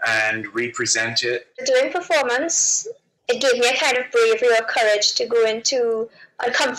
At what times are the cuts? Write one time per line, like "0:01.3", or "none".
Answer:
0:01.5